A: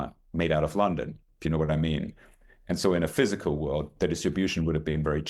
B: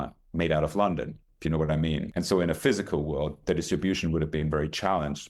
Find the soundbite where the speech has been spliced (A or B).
B